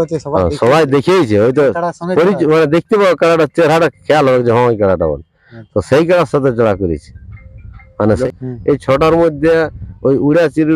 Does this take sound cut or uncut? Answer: cut